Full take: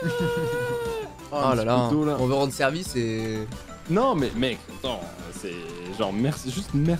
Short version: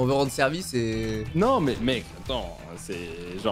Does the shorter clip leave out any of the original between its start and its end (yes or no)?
yes